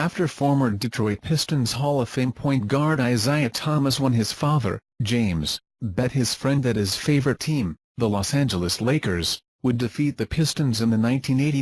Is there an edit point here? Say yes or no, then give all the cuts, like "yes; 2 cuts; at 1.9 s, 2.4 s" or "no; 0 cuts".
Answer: yes; 1 cut; at 10.6 s